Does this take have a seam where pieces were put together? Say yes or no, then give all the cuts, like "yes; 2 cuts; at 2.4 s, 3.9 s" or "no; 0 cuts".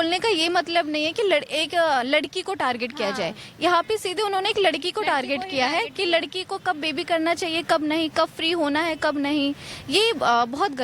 no; 0 cuts